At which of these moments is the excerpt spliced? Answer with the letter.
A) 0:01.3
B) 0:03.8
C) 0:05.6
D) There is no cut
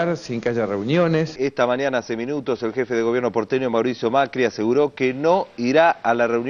A